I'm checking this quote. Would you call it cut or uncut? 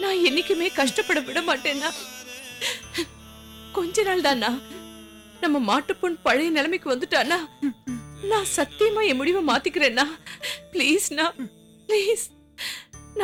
uncut